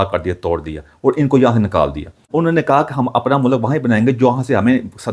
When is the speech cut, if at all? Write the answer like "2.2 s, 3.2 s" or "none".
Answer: 2.3 s